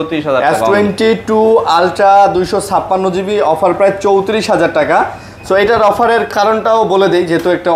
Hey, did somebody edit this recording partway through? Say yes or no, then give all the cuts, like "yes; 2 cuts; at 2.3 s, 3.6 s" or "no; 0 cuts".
no; 0 cuts